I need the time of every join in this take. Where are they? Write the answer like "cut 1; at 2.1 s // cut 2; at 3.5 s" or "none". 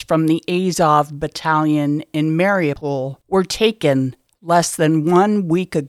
none